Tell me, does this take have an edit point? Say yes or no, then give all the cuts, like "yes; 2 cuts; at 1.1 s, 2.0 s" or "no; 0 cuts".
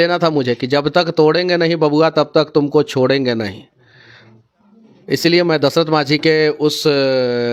no; 0 cuts